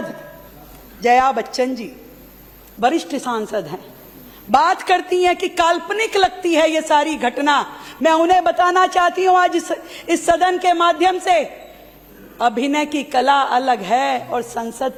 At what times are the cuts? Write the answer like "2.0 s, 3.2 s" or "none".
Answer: none